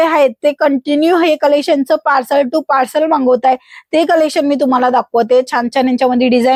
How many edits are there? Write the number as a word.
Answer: zero